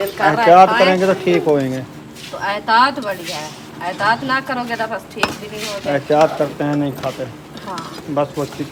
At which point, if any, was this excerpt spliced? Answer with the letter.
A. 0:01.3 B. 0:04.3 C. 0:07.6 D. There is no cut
D